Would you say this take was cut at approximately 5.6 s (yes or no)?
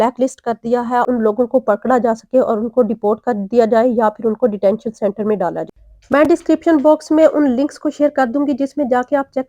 yes